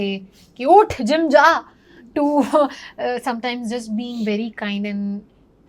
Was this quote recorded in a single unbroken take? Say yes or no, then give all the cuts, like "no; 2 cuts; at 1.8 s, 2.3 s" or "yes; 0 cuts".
yes; 0 cuts